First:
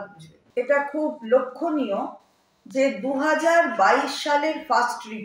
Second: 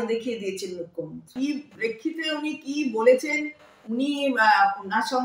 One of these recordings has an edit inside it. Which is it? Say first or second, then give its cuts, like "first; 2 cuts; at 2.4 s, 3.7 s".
second; 1 cut; at 1.2 s